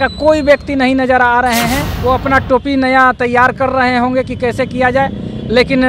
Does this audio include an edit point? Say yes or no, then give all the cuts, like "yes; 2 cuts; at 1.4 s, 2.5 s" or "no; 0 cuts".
yes; 1 cut; at 1.9 s